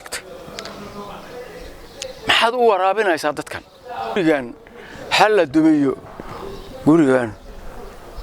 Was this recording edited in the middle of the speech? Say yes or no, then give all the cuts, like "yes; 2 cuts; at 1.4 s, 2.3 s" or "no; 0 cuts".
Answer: yes; 1 cut; at 4.2 s